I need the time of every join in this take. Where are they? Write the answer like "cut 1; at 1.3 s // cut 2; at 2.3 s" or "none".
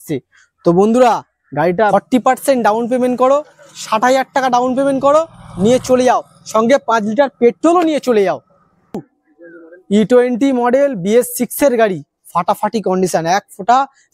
cut 1; at 1.9 s // cut 2; at 9.0 s